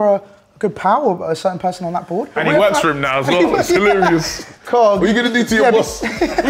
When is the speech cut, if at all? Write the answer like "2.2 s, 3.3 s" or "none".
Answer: 2.3 s